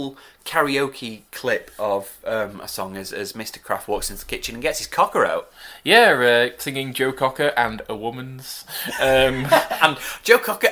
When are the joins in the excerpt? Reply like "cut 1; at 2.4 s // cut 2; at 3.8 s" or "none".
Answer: none